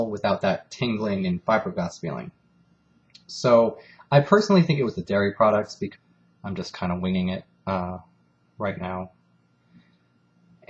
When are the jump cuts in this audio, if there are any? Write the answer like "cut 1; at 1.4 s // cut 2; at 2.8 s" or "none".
none